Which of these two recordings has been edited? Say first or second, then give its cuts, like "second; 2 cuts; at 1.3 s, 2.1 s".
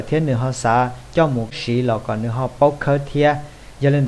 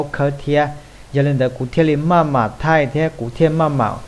first; 1 cut; at 1.6 s